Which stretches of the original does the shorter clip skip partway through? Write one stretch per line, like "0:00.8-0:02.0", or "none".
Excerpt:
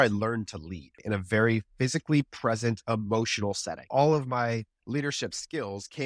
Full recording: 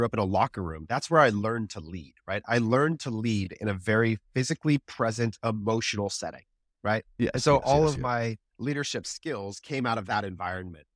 0:02.2-0:03.5
0:06.5-0:07.6